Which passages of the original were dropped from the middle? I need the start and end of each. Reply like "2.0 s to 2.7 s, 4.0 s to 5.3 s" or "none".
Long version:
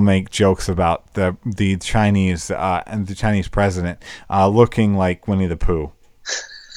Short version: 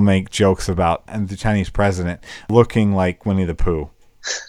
1.1 s to 2.9 s, 4.3 s to 4.5 s